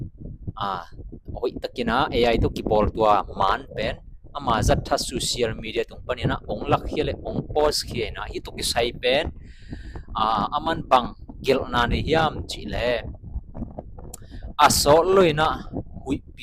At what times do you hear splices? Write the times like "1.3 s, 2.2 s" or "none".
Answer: none